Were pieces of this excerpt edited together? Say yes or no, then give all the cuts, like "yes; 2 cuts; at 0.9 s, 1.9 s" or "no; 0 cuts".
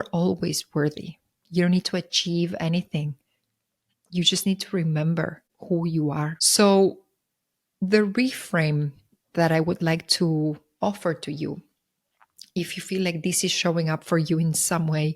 no; 0 cuts